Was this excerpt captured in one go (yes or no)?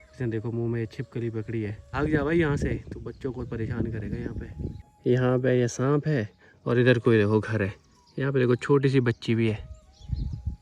yes